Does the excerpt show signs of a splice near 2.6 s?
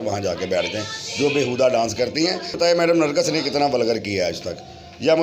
yes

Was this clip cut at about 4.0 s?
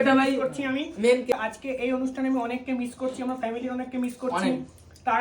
no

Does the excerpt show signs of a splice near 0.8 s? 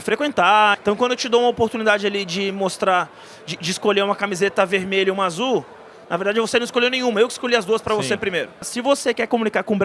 yes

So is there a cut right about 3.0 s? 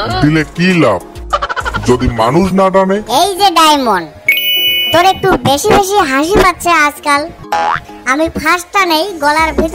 yes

